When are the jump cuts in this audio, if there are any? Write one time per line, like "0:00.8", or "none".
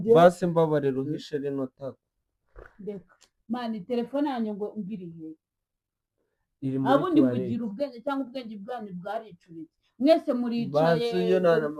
none